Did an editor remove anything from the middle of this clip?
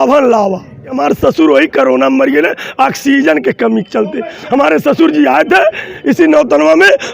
yes; 1 cut; at 1.0 s

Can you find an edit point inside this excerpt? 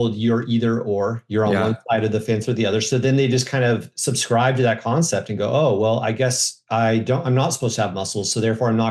no; 0 cuts

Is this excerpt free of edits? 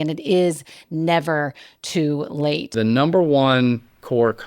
no; 1 cut; at 2.7 s

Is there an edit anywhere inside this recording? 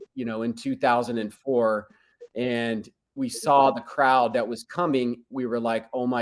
no; 0 cuts

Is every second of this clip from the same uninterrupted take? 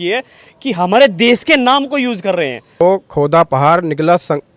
no; 1 cut; at 2.8 s

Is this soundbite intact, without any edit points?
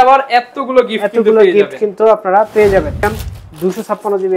no; 1 cut; at 3.2 s

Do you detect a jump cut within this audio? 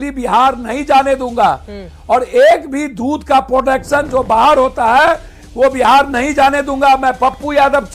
no; 0 cuts

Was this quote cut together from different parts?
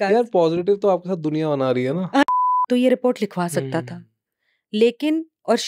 yes; 1 cut; at 2.3 s

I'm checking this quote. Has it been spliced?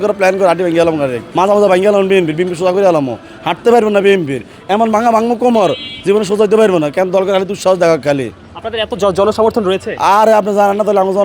yes; 1 cut; at 1.2 s

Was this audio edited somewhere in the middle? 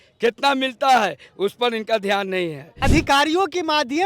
yes; 1 cut; at 2.7 s

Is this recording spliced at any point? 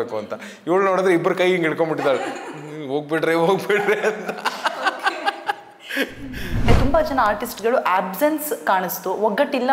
yes; 1 cut; at 6.7 s

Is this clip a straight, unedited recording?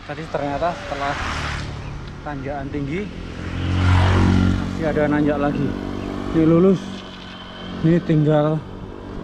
yes; 0 cuts

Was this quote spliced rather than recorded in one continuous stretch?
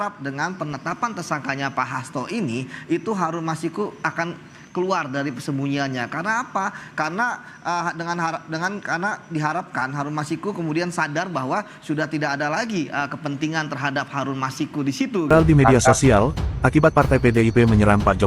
yes; 1 cut; at 15.3 s

